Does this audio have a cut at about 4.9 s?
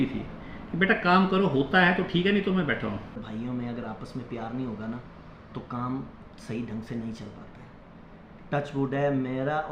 no; 1 cut; at 3.2 s

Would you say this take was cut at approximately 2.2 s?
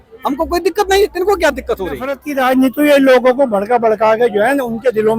yes; 1 cut; at 2.2 s

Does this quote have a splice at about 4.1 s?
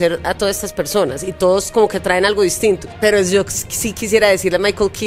no; 1 cut; at 2.9 s

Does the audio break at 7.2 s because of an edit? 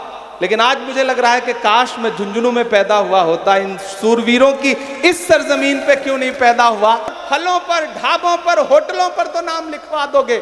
yes; 1 cut; at 7.2 s

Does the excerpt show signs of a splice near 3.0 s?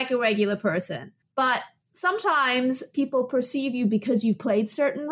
no; 2 cuts; at 1.1 s, 1.8 s

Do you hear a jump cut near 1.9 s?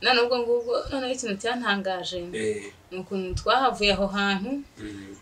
no; 0 cuts

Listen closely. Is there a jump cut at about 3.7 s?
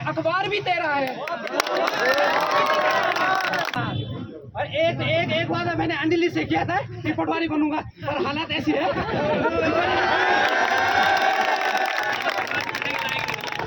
yes; 1 cut; at 3.7 s

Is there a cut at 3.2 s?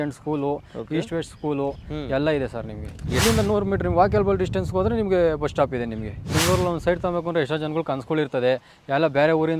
yes; 2 cuts; at 3.2 s, 6.2 s

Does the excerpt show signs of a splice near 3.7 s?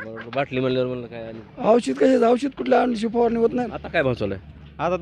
yes; 1 cut; at 3.7 s

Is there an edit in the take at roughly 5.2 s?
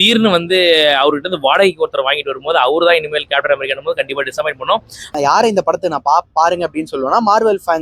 yes; 1 cut; at 5.2 s

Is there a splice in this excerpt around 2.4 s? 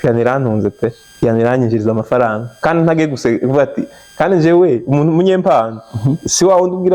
no; 1 cut; at 1.0 s

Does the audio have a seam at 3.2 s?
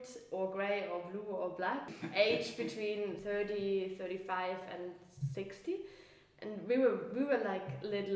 yes; 2 cuts; at 2.0 s, 3.2 s

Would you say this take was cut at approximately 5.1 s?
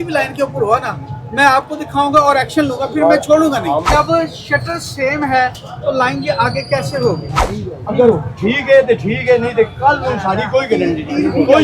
no; 2 cuts; at 3.9 s, 7.3 s

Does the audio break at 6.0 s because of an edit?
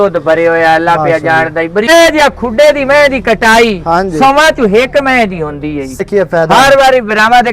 yes; 2 cuts; at 1.9 s, 6.0 s

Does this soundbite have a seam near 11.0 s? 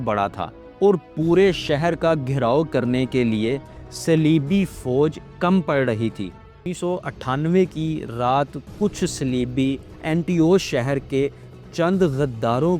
no; 1 cut; at 6.7 s

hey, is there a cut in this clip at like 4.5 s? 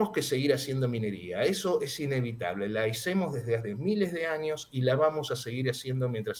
no; 0 cuts

